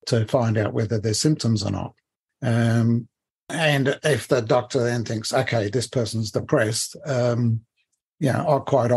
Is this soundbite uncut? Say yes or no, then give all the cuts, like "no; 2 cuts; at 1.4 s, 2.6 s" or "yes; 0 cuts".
no; 1 cut; at 3.5 s